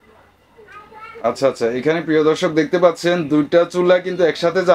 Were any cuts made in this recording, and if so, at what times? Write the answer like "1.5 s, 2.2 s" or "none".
none